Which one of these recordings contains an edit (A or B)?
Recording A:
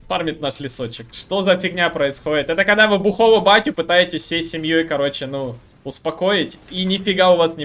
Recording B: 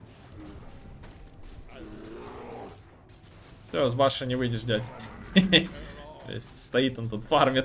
A